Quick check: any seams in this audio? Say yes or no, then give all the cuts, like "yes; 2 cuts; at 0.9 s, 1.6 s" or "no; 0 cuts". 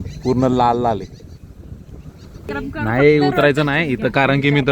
yes; 1 cut; at 2.5 s